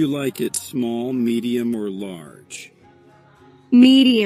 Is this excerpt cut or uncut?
uncut